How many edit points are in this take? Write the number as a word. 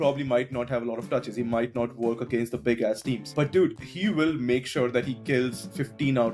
zero